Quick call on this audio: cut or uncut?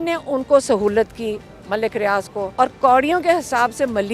cut